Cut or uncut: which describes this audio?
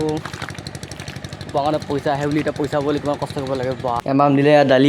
cut